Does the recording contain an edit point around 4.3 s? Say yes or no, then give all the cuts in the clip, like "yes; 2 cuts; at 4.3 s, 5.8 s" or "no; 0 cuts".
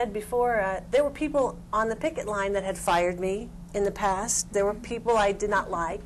yes; 1 cut; at 4.3 s